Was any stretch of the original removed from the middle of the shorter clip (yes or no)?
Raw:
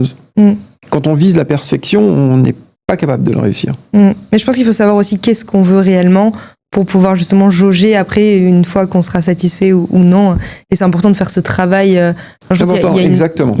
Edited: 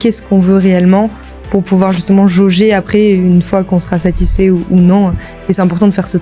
no